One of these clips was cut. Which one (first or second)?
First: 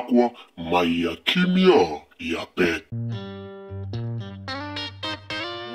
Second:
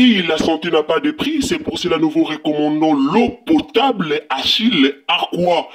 first